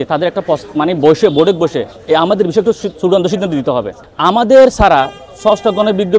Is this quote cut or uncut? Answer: cut